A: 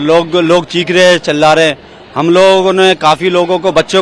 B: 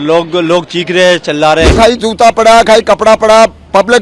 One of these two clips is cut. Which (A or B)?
B